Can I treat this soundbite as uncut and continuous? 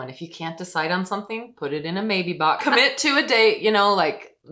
no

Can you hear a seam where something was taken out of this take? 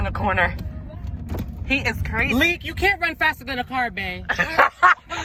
no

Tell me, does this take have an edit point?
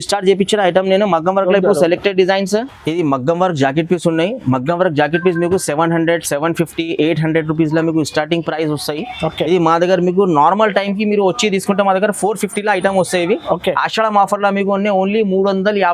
no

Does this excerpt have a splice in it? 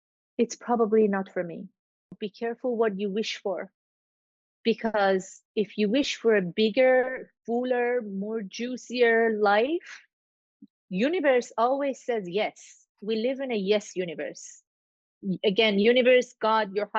yes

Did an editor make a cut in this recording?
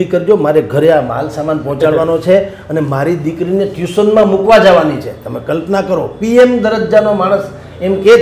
no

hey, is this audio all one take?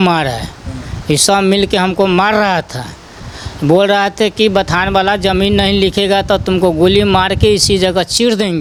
yes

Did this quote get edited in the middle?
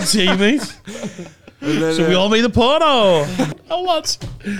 yes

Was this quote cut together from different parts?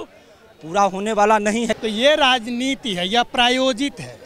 yes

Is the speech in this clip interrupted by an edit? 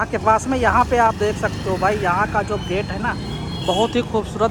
no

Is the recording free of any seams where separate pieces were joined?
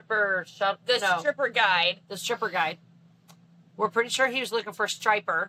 yes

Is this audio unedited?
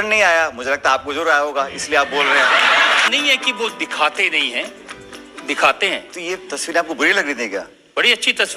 no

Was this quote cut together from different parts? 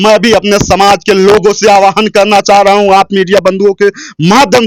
no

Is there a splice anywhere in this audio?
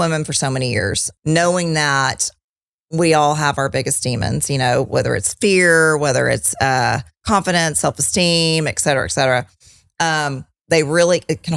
yes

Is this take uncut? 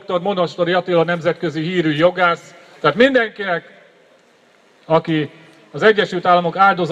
no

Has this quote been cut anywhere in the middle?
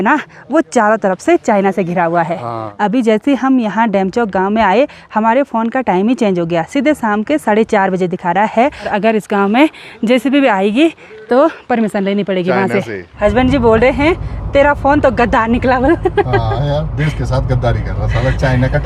yes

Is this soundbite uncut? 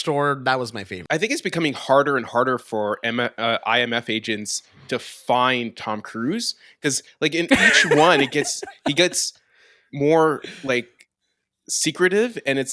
no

